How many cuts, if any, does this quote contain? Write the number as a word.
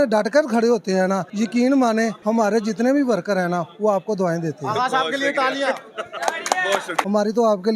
three